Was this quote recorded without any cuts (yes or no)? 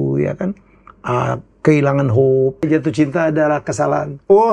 no